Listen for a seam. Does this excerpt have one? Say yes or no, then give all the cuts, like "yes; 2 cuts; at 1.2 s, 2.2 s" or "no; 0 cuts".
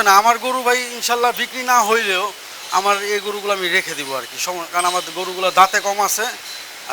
no; 0 cuts